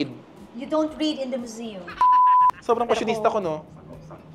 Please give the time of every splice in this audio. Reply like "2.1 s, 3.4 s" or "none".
1.9 s, 2.6 s